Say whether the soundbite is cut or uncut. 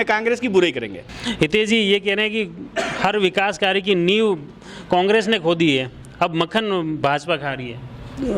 uncut